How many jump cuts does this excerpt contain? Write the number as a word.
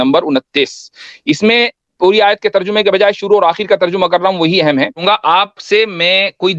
one